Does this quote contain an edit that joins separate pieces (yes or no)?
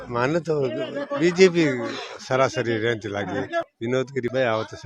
yes